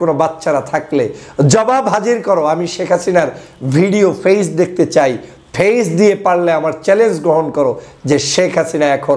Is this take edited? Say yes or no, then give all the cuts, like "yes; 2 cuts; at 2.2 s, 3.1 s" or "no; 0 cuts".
no; 0 cuts